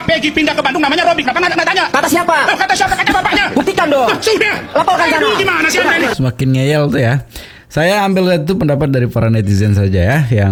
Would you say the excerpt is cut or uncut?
uncut